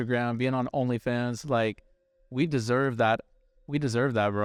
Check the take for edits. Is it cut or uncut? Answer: uncut